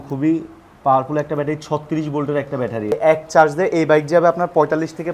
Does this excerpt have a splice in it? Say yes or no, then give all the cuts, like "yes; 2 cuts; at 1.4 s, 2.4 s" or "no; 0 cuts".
yes; 1 cut; at 2.9 s